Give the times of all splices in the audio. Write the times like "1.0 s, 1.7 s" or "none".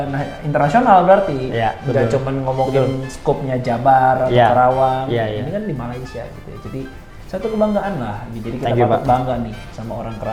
none